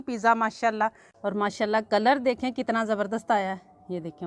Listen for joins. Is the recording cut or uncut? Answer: cut